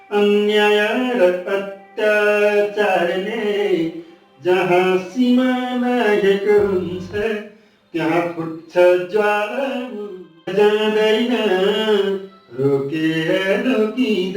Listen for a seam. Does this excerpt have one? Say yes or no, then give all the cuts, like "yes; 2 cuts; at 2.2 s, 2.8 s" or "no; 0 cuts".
yes; 1 cut; at 10.5 s